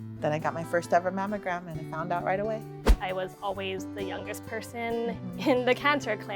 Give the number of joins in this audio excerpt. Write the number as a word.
one